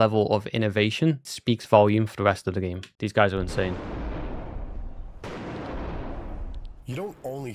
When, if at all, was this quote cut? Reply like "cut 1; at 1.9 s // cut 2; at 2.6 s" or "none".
cut 1; at 3.8 s